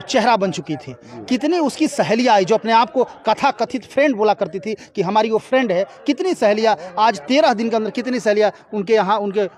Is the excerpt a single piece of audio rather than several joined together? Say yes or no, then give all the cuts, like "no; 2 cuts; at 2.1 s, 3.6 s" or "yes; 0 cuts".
yes; 0 cuts